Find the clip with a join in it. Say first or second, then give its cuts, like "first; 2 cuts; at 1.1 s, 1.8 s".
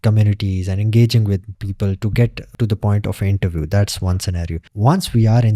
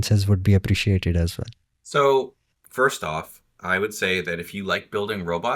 first; 2 cuts; at 1.5 s, 2.5 s